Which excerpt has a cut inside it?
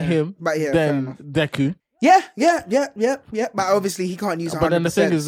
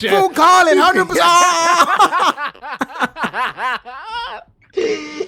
first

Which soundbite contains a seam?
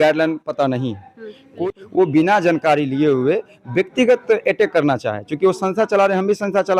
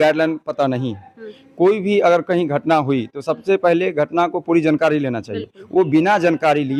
first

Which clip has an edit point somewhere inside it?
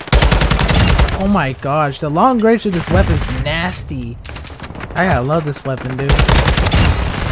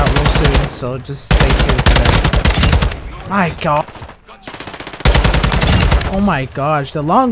second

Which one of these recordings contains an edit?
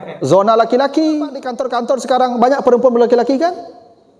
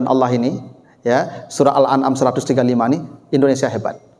first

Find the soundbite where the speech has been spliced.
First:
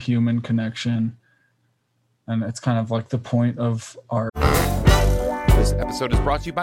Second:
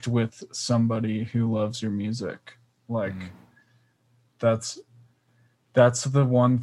first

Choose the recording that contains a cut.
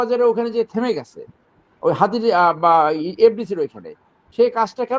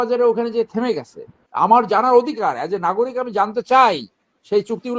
second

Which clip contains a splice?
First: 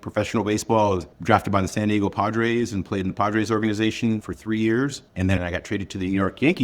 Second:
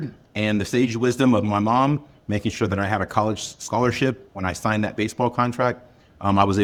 first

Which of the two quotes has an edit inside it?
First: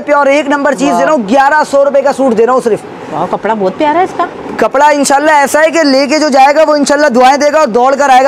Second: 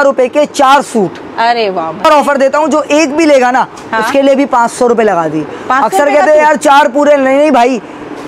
second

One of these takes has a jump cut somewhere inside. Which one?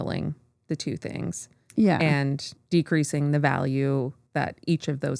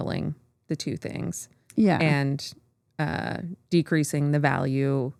first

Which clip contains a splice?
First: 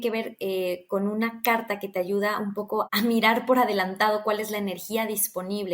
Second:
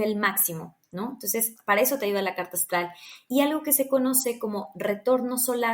first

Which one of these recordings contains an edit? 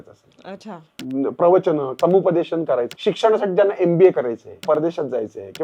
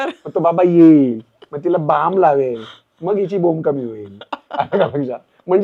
first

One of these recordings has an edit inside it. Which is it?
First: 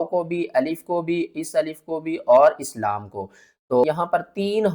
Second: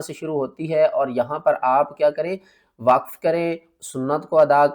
first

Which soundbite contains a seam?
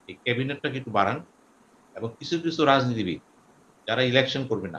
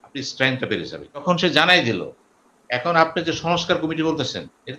second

